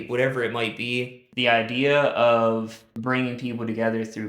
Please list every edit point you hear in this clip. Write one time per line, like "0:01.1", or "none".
0:01.2
0:02.8